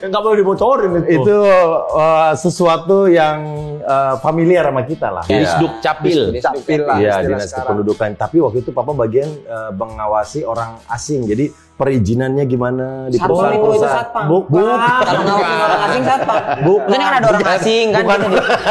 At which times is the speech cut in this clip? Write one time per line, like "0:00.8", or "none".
0:05.3